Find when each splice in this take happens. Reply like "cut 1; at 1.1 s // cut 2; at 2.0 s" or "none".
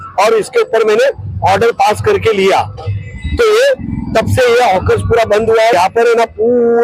cut 1; at 5.7 s